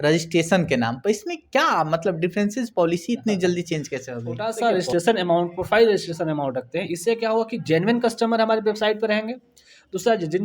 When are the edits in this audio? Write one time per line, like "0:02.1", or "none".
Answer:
0:04.5